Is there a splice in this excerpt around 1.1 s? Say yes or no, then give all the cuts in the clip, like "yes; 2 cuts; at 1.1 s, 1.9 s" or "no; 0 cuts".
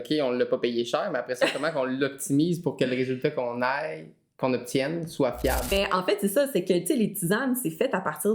no; 1 cut; at 5.7 s